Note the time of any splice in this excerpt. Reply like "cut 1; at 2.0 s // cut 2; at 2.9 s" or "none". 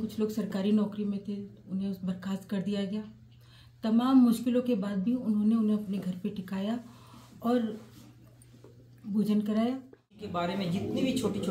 cut 1; at 10.3 s